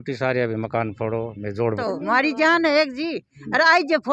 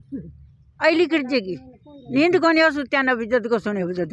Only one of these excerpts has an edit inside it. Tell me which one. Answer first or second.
first